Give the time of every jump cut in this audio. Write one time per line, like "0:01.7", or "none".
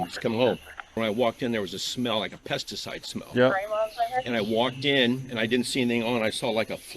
0:01.0